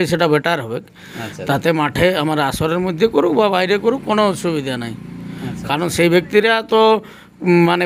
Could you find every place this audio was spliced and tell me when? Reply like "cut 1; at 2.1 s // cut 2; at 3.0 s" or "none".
none

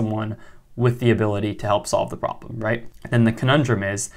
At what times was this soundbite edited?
none

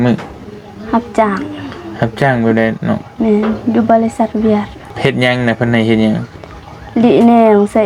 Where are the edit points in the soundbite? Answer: cut 1; at 4.8 s

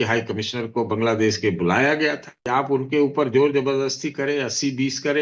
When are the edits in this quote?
cut 1; at 2.3 s

